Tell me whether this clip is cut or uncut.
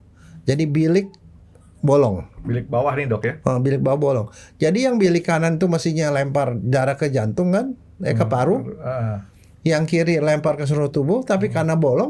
uncut